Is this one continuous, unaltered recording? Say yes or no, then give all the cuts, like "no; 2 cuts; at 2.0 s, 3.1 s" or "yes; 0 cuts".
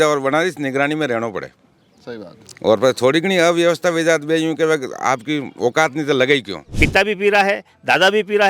no; 1 cut; at 6.6 s